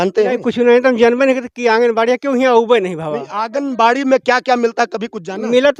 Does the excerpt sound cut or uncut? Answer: uncut